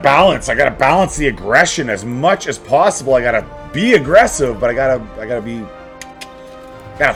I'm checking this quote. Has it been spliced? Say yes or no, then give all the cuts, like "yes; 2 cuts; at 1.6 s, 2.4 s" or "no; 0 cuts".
no; 0 cuts